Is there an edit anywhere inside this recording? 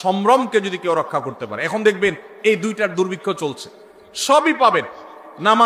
no; 0 cuts

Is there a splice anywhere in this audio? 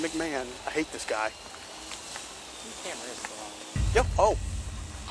yes; 1 cut; at 1.4 s

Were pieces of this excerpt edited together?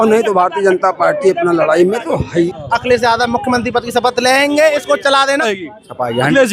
yes; 2 cuts; at 2.5 s, 5.5 s

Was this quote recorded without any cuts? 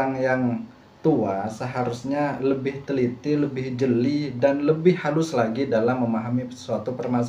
yes; 0 cuts

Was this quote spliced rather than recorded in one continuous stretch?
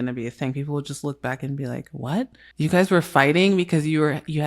yes; 1 cut; at 2.4 s

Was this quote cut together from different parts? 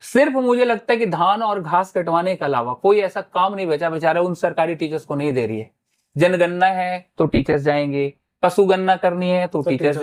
no; 0 cuts

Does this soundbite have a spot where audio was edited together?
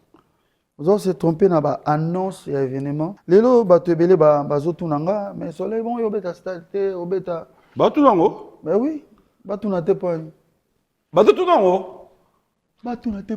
yes; 1 cut; at 3.2 s

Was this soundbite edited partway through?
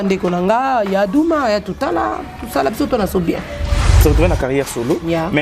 yes; 1 cut; at 4.0 s

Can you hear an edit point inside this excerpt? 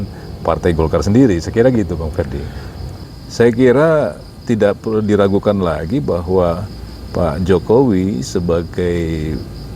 yes; 1 cut; at 2.8 s

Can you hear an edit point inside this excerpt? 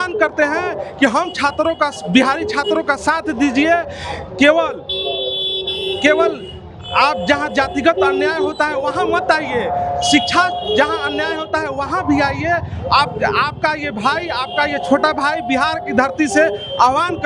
no; 0 cuts

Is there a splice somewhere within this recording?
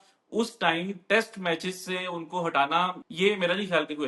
yes; 1 cut; at 3.0 s

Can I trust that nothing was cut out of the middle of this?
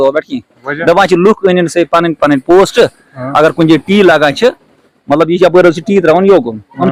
yes; 0 cuts

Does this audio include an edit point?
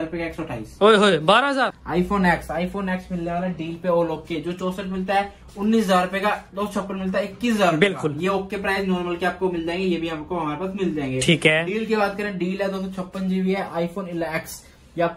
yes; 1 cut; at 1.8 s

